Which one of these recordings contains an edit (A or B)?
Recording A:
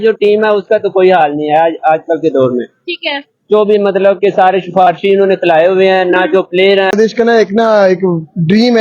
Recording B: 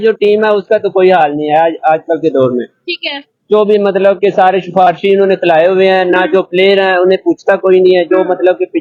A